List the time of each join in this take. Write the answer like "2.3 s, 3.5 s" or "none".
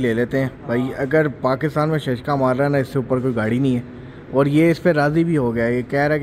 none